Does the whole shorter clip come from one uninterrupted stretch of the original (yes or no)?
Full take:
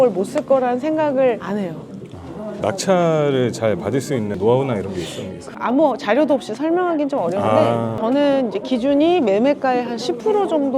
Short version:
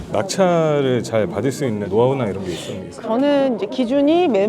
no